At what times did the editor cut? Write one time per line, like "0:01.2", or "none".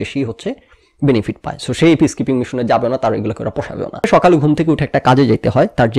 0:04.0